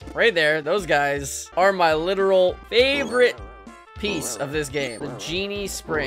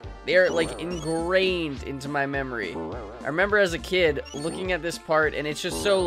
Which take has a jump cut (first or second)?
first